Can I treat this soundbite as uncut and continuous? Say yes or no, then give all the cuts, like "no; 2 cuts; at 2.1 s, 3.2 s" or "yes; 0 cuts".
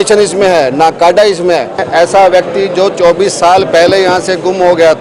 no; 1 cut; at 1.8 s